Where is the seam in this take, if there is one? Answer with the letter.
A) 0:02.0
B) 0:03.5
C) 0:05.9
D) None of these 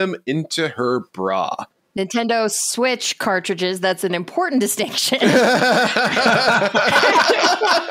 A